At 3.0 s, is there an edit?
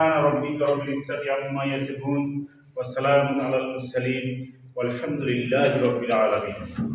no; 0 cuts

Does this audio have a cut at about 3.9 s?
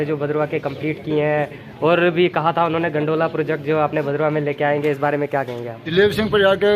no; 1 cut; at 5.8 s

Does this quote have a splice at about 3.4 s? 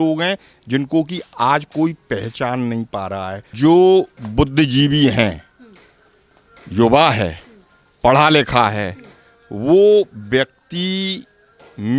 yes; 1 cut; at 3.4 s

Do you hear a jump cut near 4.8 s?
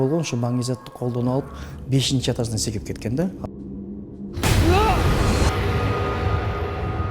no; 1 cut; at 3.5 s

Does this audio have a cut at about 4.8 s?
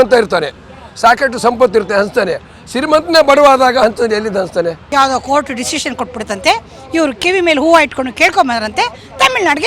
yes; 1 cut; at 4.8 s

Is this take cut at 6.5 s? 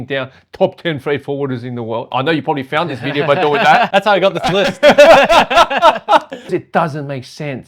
yes; 1 cut; at 6.5 s

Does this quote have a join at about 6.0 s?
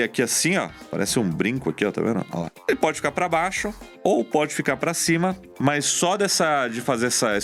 no; 1 cut; at 2.5 s

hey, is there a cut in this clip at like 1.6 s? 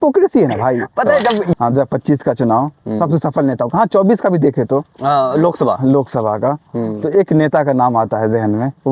yes; 1 cut; at 1.6 s

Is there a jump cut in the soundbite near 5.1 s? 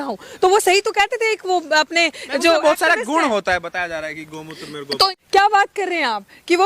yes; 1 cut; at 5.1 s

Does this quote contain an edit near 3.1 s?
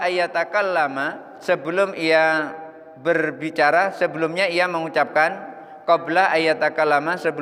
no; 0 cuts

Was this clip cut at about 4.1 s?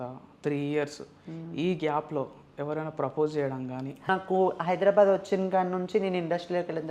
yes; 1 cut; at 4.1 s

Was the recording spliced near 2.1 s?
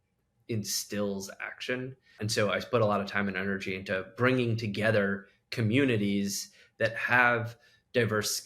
yes; 1 cut; at 2.1 s

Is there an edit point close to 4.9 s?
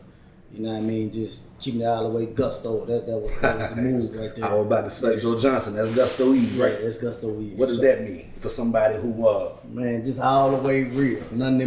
no; 0 cuts

